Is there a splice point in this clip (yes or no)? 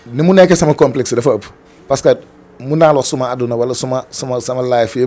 no